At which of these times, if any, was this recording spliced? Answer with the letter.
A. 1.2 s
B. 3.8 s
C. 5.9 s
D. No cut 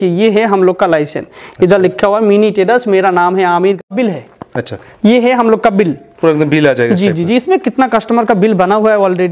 B